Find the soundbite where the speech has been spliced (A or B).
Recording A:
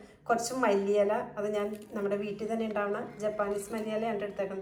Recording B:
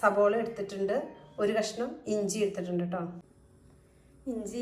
B